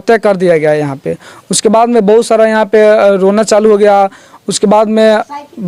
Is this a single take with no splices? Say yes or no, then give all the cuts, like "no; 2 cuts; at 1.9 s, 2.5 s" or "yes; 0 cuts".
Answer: yes; 0 cuts